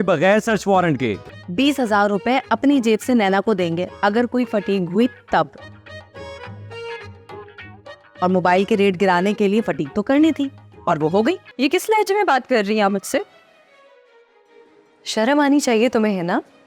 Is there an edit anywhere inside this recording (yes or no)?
yes